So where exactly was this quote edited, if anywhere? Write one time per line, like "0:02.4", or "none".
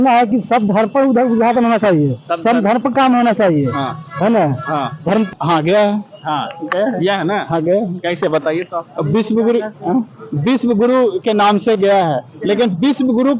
0:05.3